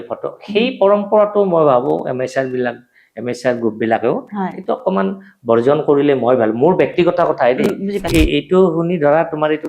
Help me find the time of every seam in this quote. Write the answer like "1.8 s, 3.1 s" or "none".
8.1 s